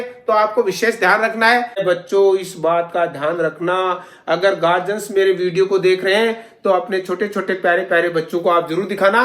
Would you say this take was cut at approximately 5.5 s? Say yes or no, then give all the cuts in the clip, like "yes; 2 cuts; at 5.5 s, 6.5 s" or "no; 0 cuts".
no; 1 cut; at 1.8 s